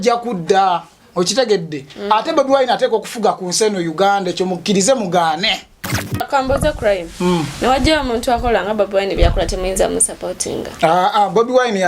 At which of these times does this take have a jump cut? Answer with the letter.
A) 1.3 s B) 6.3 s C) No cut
B